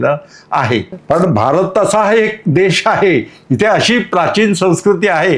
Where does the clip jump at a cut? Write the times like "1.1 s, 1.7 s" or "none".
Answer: 0.9 s

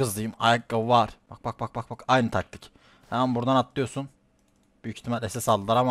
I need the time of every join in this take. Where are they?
1.3 s

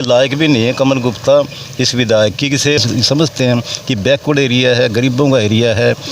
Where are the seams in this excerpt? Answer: 2.8 s

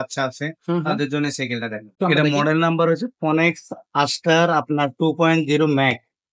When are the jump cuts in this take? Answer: 1.9 s

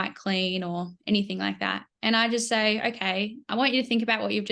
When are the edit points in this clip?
none

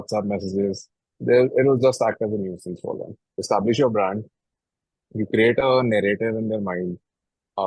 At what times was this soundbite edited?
3.4 s

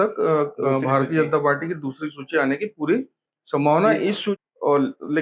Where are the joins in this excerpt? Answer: 4.3 s

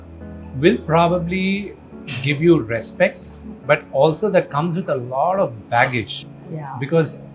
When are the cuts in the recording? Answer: none

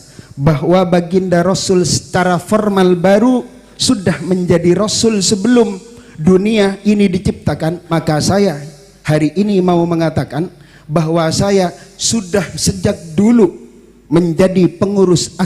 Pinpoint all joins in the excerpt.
7.8 s

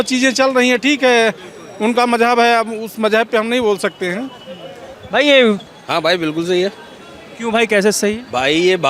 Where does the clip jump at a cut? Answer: 5.6 s

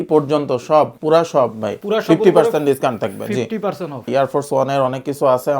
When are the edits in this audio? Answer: 1.0 s, 1.8 s, 4.1 s

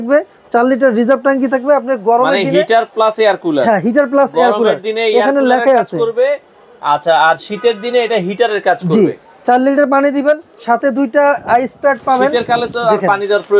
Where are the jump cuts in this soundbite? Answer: none

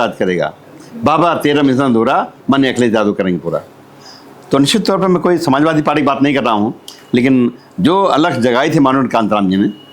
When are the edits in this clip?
none

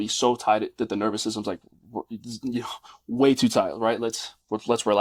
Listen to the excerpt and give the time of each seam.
none

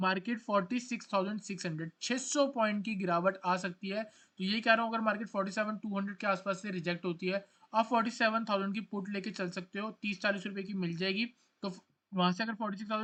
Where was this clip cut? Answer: none

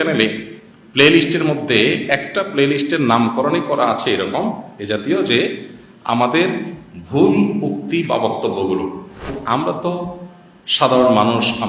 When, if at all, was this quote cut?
9.4 s

